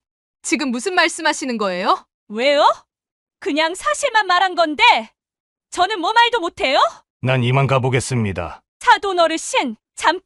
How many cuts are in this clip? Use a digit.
2